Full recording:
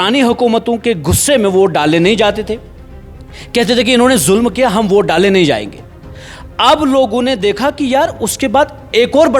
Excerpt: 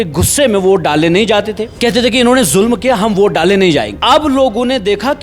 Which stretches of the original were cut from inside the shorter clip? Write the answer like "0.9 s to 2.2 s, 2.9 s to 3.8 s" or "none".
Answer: 2.5 s to 3.4 s, 5.7 s to 6.5 s